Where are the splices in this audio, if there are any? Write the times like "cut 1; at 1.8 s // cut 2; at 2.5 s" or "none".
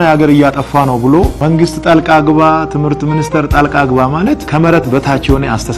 cut 1; at 1.4 s // cut 2; at 4.4 s